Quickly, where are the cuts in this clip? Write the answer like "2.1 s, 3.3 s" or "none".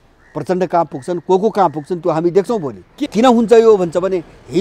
3.1 s